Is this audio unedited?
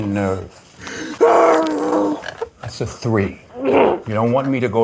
yes; 0 cuts

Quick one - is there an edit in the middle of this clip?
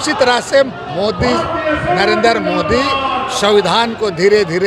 no; 0 cuts

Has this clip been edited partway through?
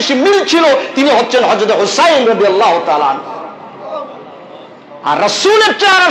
no; 0 cuts

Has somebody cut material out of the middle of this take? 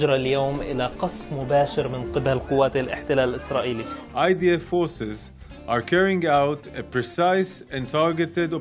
yes; 1 cut; at 4.1 s

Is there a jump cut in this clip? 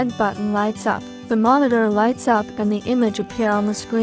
yes; 1 cut; at 1.1 s

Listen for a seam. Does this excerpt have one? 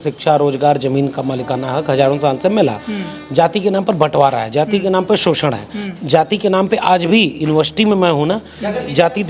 no; 0 cuts

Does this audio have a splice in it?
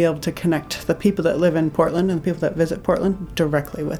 no; 0 cuts

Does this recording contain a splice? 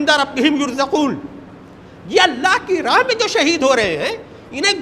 no; 0 cuts

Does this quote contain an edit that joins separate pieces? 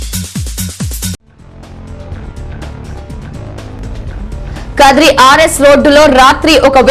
yes; 2 cuts; at 3.2 s, 4.7 s

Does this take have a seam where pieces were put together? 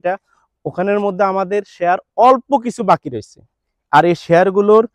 no; 0 cuts

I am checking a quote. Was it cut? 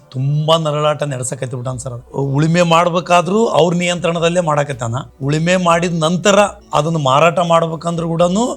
no; 0 cuts

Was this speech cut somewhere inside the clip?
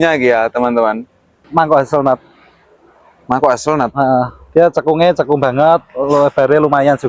yes; 1 cut; at 1.4 s

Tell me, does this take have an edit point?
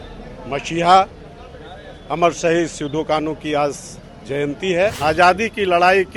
yes; 1 cut; at 5.0 s

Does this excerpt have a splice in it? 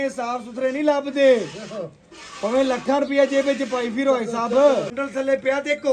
yes; 1 cut; at 4.9 s

